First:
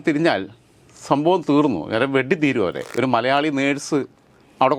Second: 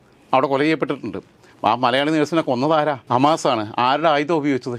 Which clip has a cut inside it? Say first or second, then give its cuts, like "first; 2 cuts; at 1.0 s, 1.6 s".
first; 1 cut; at 2.9 s